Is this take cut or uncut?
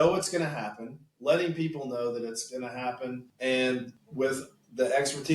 cut